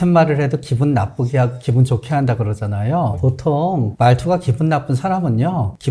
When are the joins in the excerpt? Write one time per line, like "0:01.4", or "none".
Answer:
none